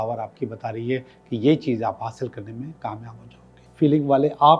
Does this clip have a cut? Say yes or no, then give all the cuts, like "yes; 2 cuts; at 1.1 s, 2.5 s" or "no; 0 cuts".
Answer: yes; 1 cut; at 3.6 s